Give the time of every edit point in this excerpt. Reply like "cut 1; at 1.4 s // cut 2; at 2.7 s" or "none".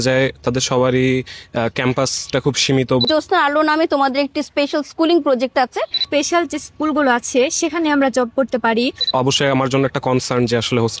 cut 1; at 3.1 s // cut 2; at 6.0 s // cut 3; at 9.1 s